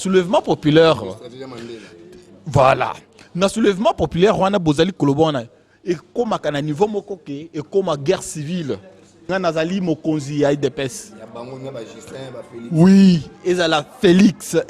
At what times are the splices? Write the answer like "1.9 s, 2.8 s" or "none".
9.2 s